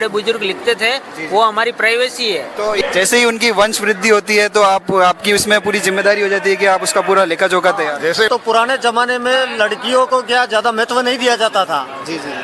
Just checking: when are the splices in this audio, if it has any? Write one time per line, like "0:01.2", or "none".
0:02.8
0:08.3

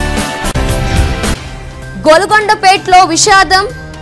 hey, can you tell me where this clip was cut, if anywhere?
0:01.3

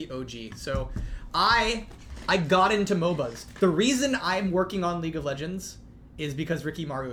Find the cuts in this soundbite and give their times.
none

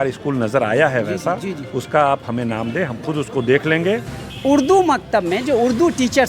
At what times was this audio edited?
0:04.2

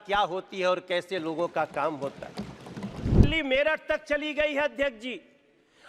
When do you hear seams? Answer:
0:03.2

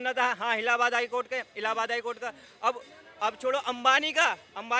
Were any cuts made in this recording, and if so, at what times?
none

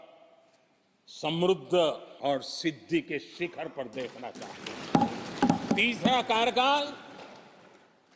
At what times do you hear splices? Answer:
0:02.1
0:05.6

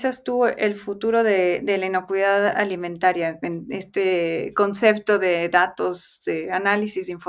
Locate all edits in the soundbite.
none

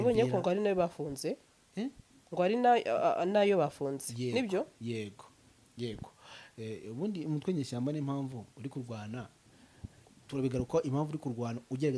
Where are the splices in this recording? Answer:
none

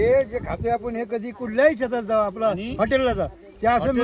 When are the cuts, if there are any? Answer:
none

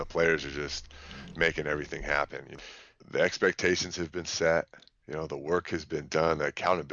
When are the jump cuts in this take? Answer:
0:02.4

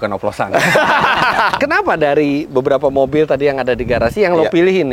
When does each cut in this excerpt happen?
0:01.5

